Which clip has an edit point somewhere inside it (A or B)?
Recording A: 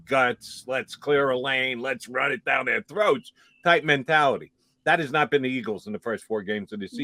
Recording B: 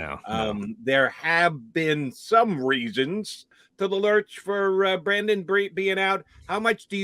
B